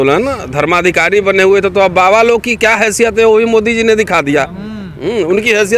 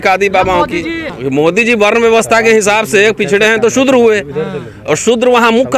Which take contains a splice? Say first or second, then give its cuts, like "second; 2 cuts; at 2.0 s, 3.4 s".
second; 1 cut; at 1.1 s